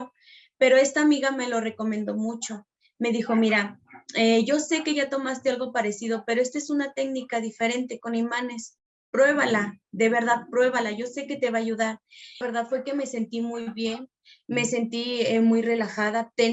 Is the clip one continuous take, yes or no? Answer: no